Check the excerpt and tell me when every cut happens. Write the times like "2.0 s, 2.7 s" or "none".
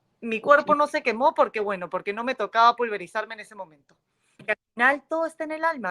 4.4 s